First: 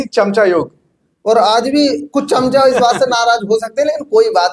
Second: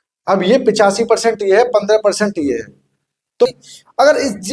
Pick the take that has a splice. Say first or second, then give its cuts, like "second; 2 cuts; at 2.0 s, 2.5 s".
second; 1 cut; at 3.5 s